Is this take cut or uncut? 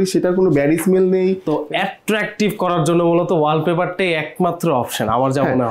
cut